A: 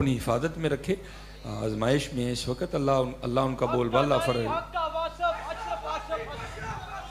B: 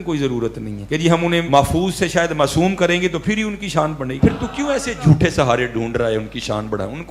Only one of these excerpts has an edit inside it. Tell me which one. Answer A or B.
B